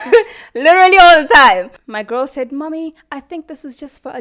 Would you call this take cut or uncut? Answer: cut